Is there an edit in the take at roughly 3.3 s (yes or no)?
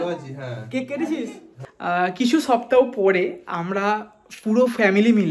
no